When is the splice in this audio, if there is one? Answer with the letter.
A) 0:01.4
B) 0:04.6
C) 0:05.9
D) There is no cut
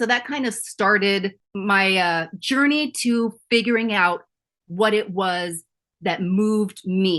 A